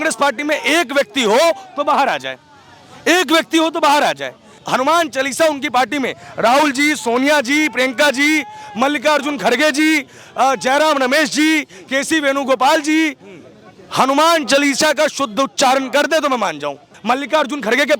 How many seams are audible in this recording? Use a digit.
2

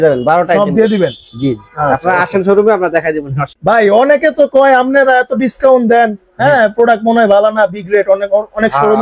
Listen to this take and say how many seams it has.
1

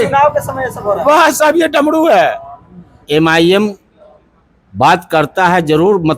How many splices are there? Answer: 1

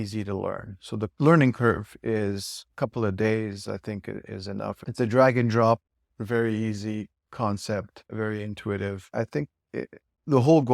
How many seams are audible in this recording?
5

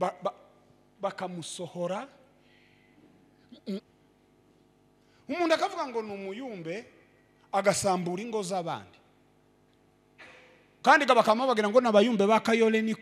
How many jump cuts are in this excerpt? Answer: 1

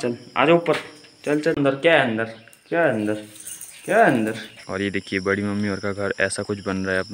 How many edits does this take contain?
2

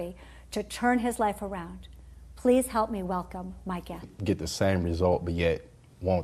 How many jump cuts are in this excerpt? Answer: 0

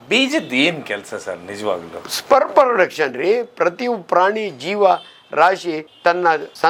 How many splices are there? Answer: 0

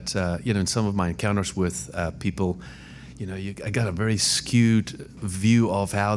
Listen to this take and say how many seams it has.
1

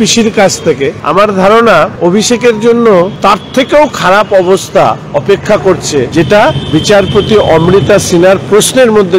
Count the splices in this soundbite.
4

